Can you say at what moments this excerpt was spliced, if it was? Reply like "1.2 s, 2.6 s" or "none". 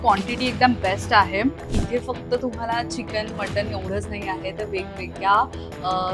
1.7 s